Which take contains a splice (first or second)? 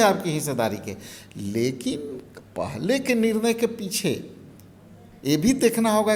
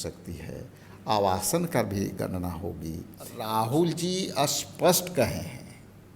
second